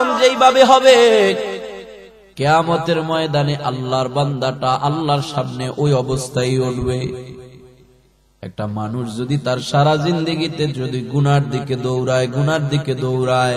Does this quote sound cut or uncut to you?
uncut